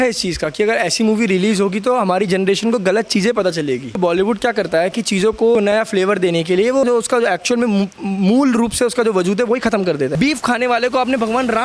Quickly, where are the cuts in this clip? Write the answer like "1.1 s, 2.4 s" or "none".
4.0 s, 5.6 s, 6.8 s, 10.1 s

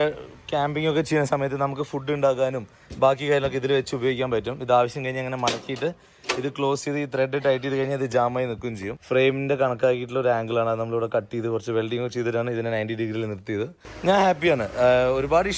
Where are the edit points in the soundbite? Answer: 8.9 s, 13.8 s

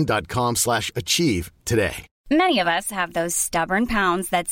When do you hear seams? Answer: 2.1 s

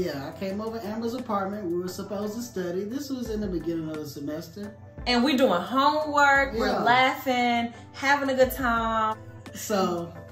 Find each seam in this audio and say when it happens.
9.2 s

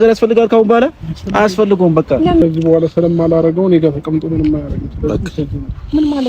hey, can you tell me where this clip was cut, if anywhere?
2.4 s

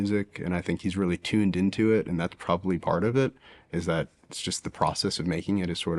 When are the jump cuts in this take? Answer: none

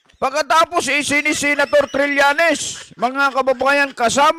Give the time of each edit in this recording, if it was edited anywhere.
none

